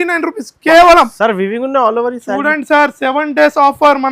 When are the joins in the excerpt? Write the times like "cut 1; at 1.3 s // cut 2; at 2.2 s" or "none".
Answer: none